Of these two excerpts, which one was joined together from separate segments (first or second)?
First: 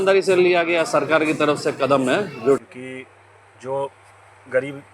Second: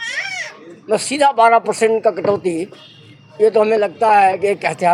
first